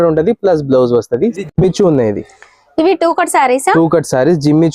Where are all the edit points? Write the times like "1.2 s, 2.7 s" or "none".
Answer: 1.4 s